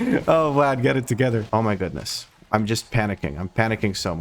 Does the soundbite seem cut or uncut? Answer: cut